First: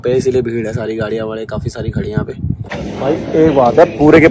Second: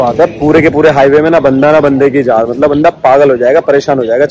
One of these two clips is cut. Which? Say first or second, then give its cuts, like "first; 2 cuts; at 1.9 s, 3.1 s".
first; 1 cut; at 2.6 s